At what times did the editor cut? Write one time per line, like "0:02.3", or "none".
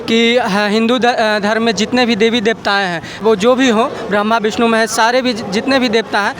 0:03.2